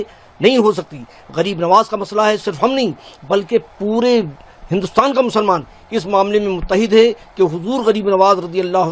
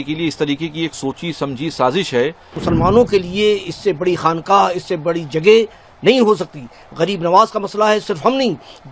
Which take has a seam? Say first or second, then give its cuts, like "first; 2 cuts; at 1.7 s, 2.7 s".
second; 1 cut; at 2.5 s